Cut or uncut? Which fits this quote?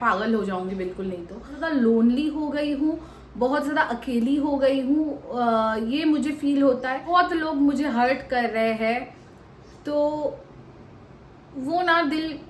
cut